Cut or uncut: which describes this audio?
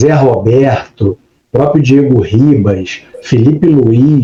uncut